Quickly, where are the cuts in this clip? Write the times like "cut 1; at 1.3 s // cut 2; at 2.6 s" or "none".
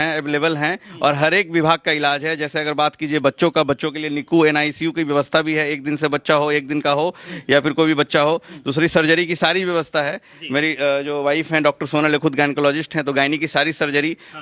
none